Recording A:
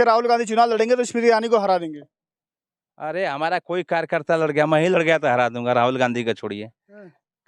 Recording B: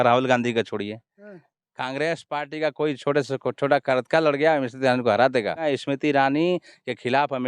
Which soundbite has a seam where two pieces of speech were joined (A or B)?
B